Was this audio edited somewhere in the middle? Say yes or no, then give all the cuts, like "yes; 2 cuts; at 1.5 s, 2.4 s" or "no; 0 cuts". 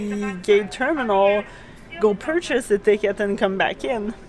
no; 0 cuts